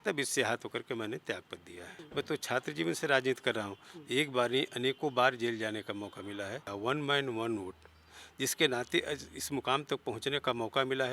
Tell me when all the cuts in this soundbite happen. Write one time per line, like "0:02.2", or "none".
0:01.9
0:06.7